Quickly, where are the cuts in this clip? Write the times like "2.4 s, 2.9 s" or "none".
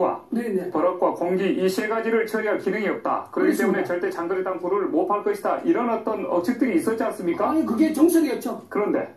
7.2 s